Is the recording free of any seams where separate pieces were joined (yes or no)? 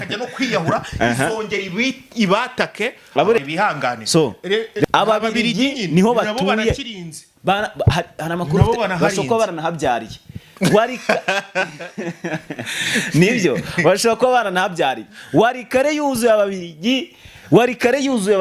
no